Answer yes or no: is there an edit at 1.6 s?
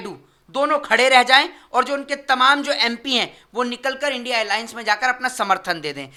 no